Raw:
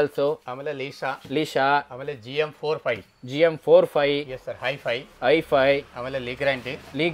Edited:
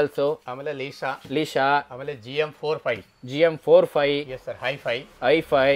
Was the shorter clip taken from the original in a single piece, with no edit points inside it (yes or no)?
yes